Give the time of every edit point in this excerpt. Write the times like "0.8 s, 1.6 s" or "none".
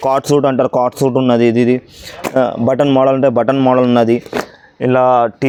none